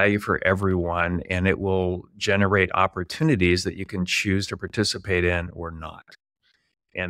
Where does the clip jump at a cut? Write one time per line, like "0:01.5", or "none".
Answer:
none